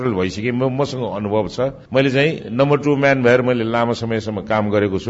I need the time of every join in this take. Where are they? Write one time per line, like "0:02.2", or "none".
none